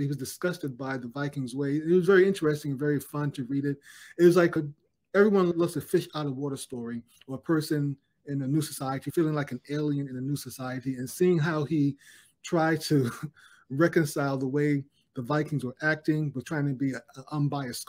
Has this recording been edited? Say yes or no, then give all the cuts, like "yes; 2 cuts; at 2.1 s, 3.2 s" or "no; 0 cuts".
yes; 1 cut; at 5.5 s